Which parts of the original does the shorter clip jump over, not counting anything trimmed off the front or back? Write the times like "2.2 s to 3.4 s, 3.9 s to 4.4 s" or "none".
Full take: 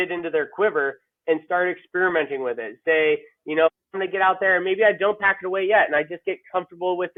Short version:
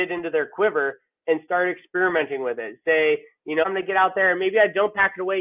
3.6 s to 3.9 s